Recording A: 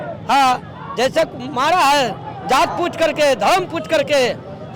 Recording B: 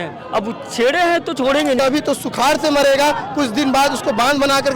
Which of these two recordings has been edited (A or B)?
B